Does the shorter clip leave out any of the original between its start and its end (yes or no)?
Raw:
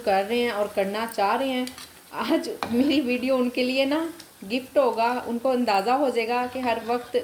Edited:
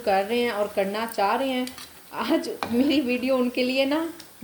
no